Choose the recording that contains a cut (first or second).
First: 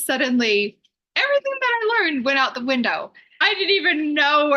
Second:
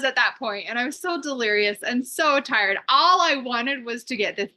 first